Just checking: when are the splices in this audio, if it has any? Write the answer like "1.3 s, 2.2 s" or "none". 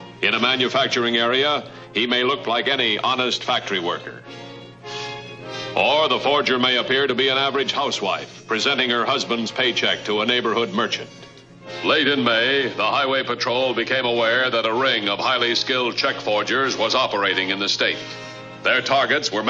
8.0 s